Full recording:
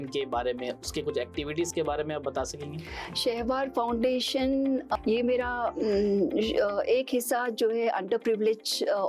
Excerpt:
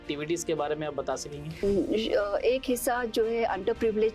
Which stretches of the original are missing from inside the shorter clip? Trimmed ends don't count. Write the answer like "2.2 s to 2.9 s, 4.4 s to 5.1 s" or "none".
2.9 s to 6.1 s